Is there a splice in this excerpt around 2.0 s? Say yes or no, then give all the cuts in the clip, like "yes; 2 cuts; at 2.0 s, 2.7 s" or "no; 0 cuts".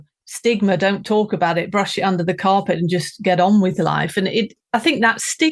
no; 1 cut; at 4.6 s